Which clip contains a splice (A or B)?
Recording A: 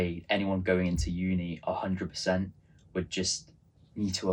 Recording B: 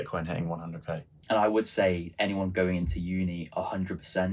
B